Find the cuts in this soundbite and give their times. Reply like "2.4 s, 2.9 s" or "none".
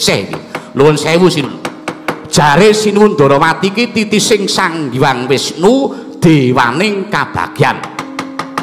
1.6 s